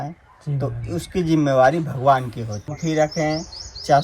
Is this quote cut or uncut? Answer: cut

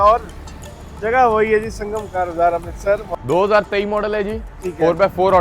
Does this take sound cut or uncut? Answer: cut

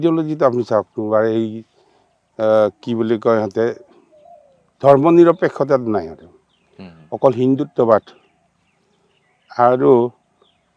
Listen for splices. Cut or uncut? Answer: uncut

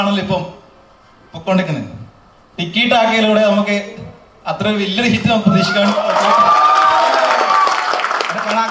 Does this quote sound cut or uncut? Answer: uncut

